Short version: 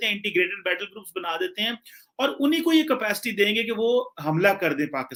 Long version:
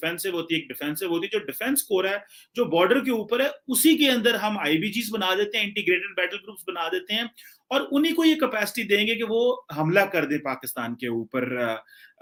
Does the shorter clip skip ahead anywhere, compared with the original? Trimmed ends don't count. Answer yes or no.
no